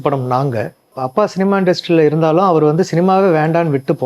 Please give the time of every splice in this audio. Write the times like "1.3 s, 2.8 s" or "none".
1.0 s